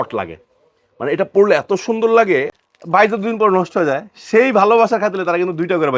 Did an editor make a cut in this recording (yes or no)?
yes